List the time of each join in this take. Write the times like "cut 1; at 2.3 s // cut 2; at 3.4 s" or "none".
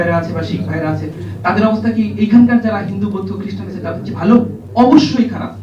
cut 1; at 4.6 s